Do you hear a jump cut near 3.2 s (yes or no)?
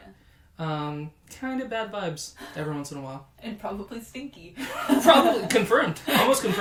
no